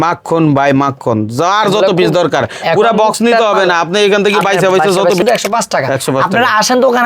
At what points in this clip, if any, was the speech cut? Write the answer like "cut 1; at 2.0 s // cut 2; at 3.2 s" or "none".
cut 1; at 5.2 s